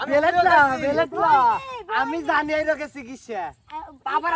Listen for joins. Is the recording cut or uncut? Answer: uncut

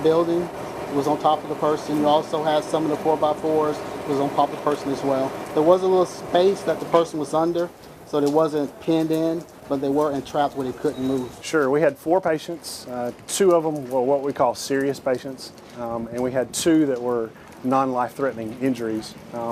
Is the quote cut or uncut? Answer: cut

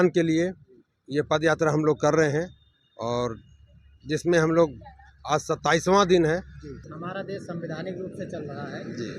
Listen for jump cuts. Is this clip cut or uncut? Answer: cut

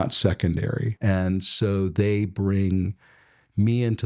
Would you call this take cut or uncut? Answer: cut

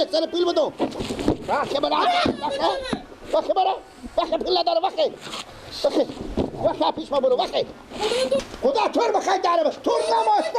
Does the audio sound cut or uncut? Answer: cut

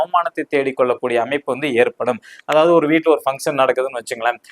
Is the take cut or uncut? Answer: uncut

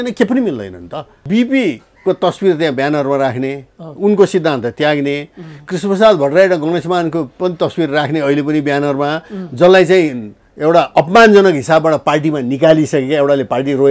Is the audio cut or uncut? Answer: cut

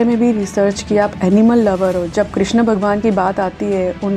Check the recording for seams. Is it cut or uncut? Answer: uncut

